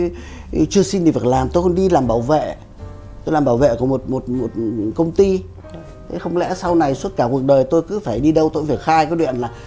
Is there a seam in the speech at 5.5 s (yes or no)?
no